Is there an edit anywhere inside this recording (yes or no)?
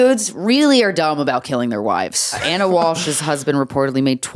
yes